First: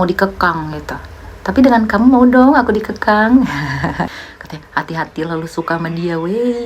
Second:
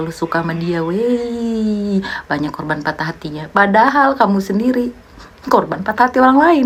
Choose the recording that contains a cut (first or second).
first